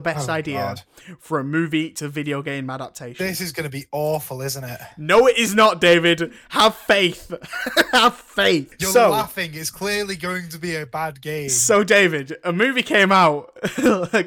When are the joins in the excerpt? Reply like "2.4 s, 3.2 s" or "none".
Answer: 8.8 s

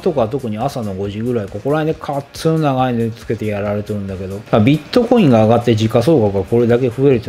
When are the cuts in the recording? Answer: 4.3 s

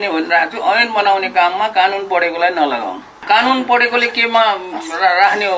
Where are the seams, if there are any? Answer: 3.1 s

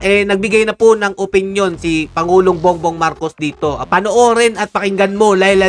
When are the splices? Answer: 3.8 s

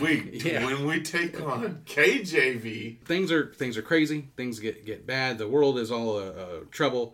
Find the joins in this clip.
3.0 s

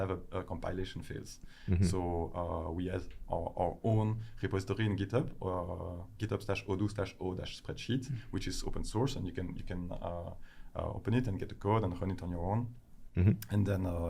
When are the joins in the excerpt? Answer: none

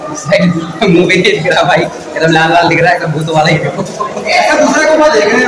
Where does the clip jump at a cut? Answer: none

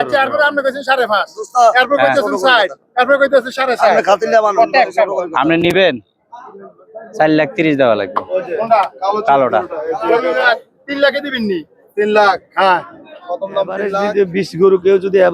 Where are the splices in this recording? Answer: 13.9 s

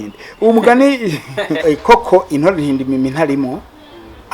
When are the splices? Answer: 1.6 s

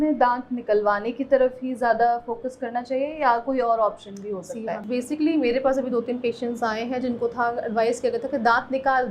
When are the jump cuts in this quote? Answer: none

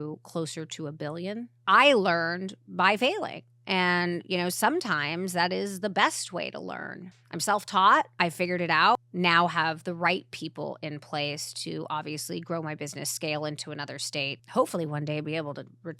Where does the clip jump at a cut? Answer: 1.5 s, 8.7 s, 14.4 s

